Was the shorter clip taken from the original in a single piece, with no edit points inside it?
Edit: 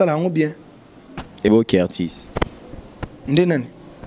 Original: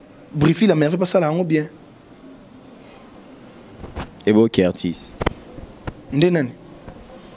no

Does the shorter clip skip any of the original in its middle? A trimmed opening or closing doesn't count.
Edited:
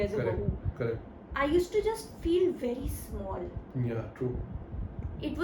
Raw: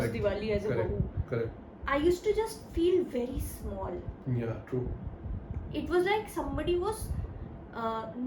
no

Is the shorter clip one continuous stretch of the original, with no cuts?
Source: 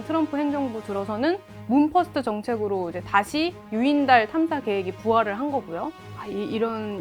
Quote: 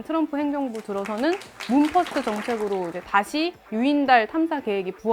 yes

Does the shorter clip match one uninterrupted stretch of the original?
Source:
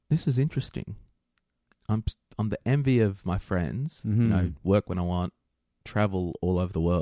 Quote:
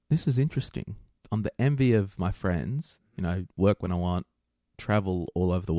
no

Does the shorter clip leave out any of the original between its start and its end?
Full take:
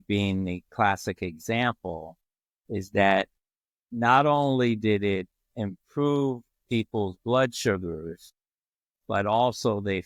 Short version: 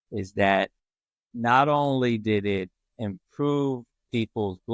no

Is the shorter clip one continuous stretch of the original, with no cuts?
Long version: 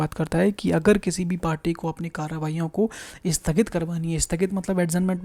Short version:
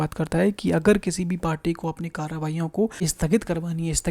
no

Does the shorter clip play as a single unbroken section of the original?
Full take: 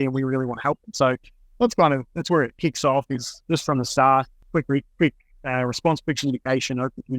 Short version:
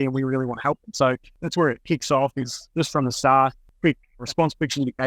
no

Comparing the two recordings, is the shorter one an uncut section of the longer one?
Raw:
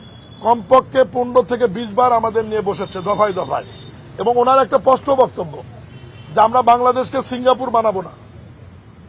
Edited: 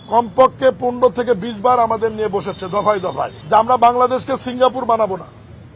no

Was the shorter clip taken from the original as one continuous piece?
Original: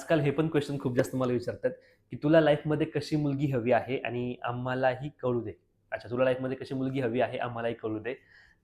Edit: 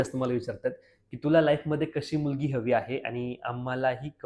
yes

